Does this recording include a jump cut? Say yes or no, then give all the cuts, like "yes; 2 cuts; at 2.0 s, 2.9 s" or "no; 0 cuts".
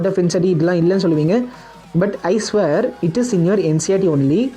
no; 0 cuts